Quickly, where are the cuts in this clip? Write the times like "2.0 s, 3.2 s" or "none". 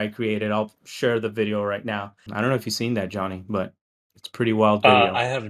2.2 s